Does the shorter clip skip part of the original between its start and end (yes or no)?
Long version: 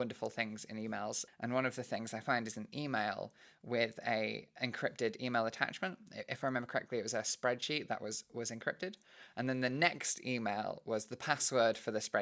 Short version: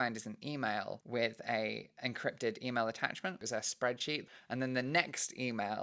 yes